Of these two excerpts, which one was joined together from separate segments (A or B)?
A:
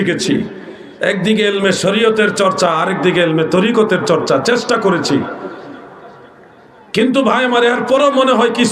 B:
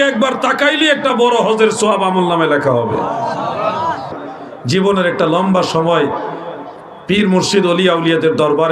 B